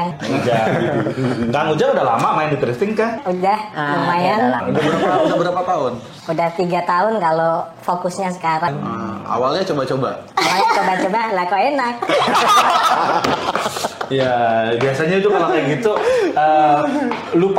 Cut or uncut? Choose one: uncut